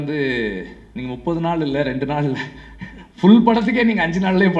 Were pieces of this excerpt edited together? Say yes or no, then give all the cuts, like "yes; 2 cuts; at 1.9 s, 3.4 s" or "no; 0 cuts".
no; 0 cuts